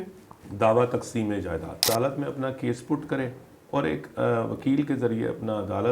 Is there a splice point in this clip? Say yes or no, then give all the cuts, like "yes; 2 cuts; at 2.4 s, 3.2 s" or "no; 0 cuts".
yes; 1 cut; at 1.9 s